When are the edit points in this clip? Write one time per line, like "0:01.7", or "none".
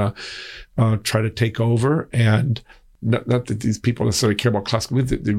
0:02.9